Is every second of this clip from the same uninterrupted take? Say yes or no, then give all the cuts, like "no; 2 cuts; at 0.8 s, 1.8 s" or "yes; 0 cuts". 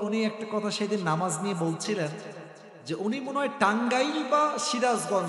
yes; 0 cuts